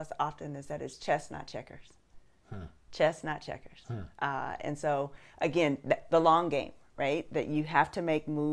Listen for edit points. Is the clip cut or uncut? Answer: uncut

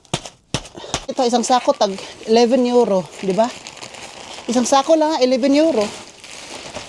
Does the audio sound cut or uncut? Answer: cut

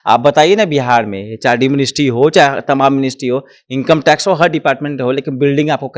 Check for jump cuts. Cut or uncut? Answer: uncut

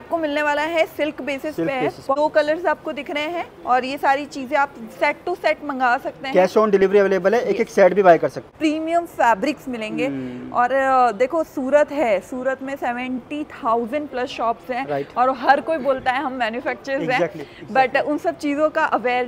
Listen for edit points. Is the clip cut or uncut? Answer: cut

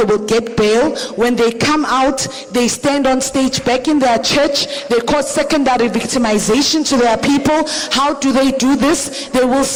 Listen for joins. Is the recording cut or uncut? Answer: uncut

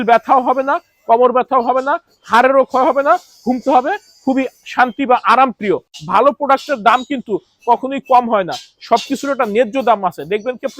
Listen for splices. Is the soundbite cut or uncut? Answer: cut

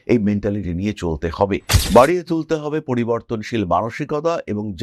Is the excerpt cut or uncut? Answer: cut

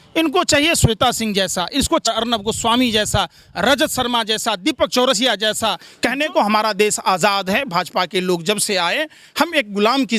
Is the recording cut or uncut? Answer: cut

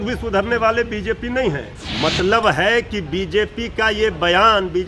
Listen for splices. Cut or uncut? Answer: cut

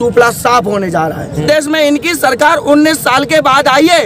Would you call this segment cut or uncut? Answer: cut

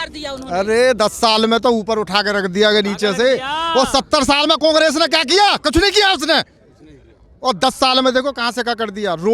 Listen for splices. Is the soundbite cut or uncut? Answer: uncut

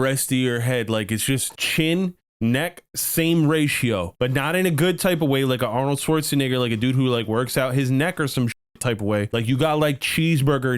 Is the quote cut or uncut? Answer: cut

